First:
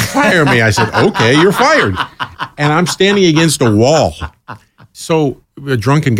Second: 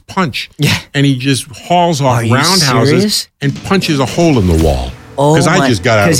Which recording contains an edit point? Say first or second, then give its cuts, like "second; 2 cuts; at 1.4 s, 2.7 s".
first; 1 cut; at 4.8 s